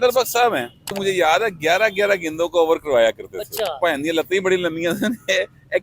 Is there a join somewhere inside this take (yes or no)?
yes